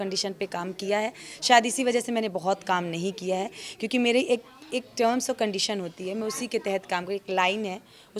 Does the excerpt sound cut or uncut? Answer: uncut